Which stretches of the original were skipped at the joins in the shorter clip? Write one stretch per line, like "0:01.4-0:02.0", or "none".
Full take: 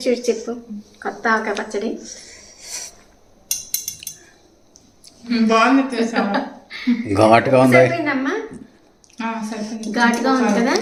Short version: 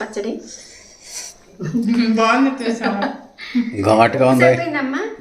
0:03.5-0:05.2